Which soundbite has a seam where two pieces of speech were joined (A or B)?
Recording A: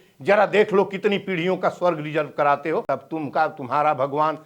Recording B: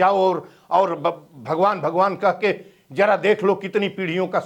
A